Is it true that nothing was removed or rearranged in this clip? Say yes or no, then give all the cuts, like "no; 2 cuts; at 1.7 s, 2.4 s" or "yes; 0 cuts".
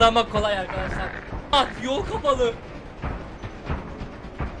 no; 1 cut; at 1.5 s